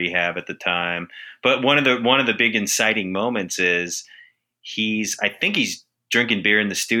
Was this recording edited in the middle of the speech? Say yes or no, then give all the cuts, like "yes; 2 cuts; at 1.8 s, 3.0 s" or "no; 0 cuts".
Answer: no; 0 cuts